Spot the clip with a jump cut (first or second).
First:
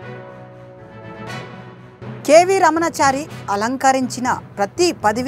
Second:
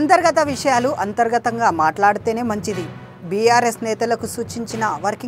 first